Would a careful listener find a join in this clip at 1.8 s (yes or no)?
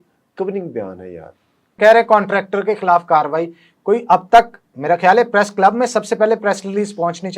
yes